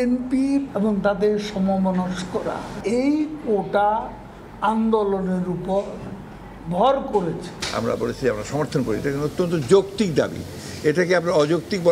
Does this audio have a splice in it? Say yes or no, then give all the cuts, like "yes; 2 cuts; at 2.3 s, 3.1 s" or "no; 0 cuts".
yes; 1 cut; at 7.5 s